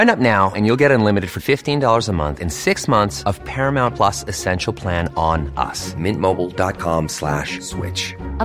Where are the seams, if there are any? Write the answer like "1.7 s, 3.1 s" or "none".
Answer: none